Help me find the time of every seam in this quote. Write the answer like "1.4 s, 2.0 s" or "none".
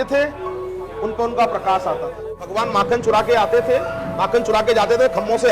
2.5 s